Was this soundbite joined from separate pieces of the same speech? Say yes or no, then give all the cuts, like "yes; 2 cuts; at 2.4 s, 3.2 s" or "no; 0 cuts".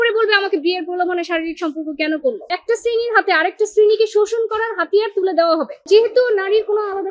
yes; 2 cuts; at 2.5 s, 5.7 s